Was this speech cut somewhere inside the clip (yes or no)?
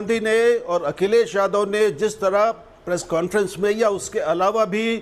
no